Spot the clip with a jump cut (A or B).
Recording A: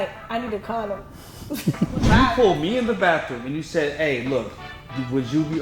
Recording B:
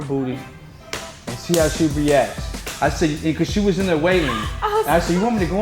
A